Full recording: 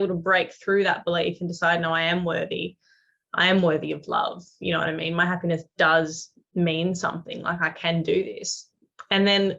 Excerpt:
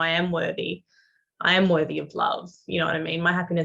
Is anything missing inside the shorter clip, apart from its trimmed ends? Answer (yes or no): no